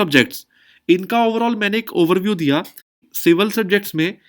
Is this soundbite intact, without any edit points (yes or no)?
no